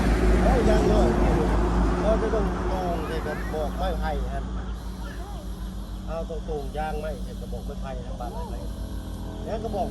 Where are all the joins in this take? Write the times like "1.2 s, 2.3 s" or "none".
none